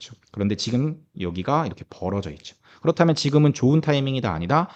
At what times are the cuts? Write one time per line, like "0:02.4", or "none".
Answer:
none

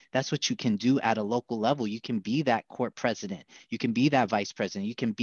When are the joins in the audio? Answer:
none

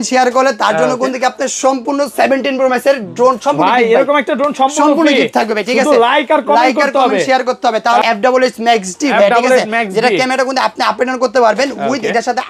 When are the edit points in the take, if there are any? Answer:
0:08.0

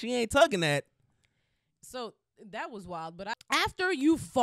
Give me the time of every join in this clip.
0:03.4

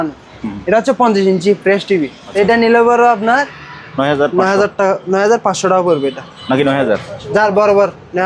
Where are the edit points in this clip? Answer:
0:02.2

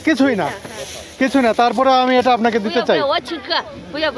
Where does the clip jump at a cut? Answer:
none

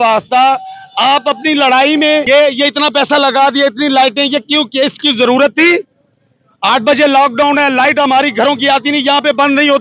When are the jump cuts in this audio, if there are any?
0:02.2

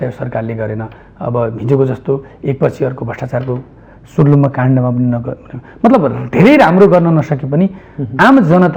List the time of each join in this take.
none

